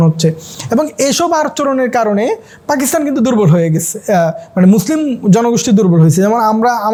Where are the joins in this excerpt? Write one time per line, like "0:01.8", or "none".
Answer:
none

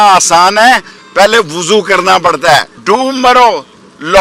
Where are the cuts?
0:02.7

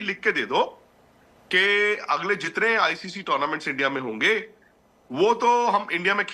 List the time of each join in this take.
none

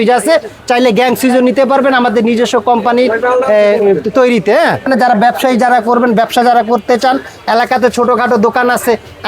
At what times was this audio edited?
0:04.8

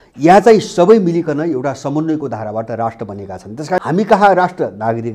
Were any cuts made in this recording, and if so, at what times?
0:03.8

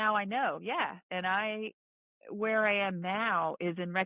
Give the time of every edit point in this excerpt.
0:01.0

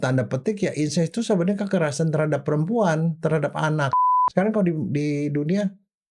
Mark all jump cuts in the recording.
0:04.0

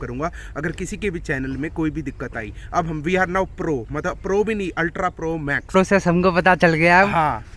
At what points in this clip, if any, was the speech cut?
0:05.7

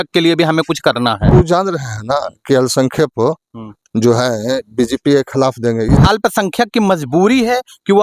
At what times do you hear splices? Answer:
0:01.3
0:06.0

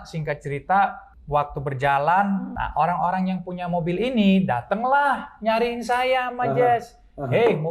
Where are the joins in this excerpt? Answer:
0:01.1
0:02.6

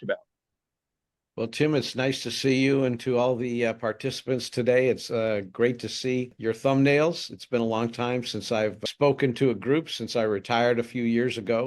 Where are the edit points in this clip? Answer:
none

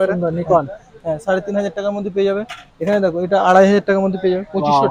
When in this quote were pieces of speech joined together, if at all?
none

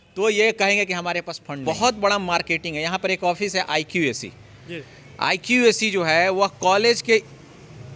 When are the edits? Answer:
0:01.6

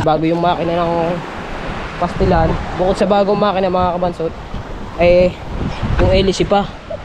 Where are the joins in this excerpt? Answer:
none

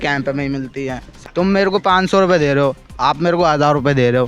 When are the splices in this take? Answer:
0:01.1

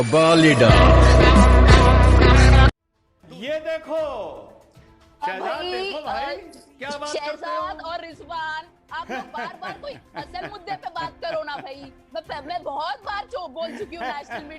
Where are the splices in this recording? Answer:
0:02.8

